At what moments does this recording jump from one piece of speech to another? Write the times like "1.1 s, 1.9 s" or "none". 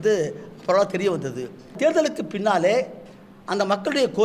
1.8 s

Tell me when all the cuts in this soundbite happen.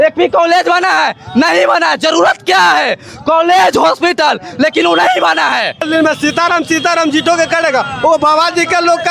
5.8 s

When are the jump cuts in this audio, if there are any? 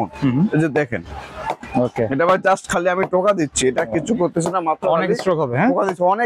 none

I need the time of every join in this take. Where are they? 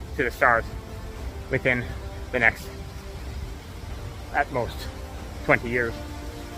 none

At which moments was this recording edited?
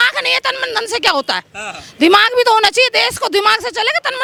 none

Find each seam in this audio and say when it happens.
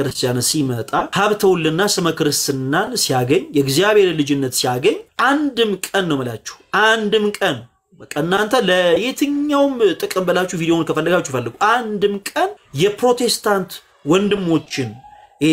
1.1 s, 5.1 s, 12.6 s

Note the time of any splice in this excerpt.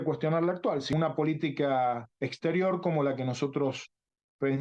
0.9 s

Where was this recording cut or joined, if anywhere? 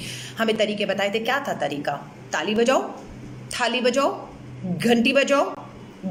none

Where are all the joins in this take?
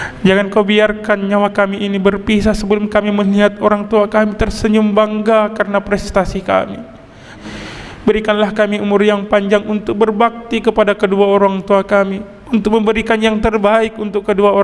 7.3 s

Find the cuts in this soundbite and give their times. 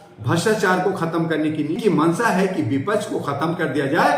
1.8 s

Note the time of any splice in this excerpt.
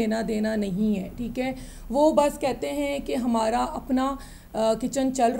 none

